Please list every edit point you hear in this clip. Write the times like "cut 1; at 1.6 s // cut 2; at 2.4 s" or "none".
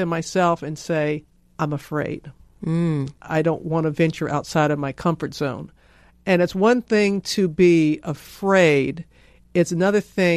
cut 1; at 1.4 s